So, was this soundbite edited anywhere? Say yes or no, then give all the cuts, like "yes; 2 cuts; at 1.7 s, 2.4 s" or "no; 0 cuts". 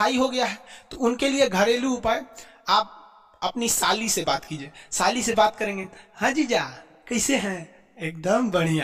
no; 0 cuts